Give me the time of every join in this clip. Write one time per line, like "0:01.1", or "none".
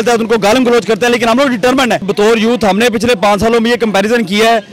0:02.1